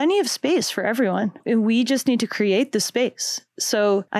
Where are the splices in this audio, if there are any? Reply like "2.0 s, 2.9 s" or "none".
1.4 s